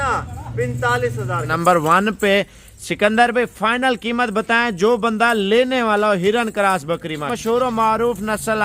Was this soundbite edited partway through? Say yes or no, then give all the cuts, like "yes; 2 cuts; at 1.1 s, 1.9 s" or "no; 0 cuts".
yes; 2 cuts; at 1.5 s, 7.3 s